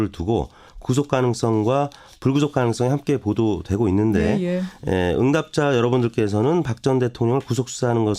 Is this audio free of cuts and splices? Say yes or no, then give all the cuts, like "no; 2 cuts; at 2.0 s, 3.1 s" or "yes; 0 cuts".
no; 1 cut; at 6.7 s